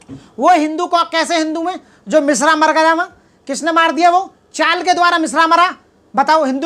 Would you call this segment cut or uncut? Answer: uncut